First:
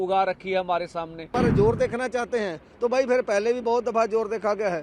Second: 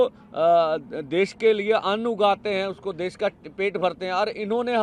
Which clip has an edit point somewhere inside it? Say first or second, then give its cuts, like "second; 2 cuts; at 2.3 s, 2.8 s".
first; 1 cut; at 1.3 s